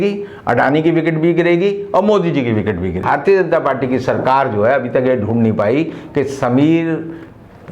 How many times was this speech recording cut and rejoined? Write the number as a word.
one